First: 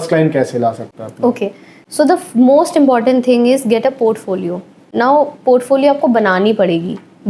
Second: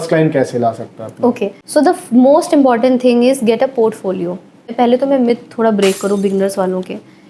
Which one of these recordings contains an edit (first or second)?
second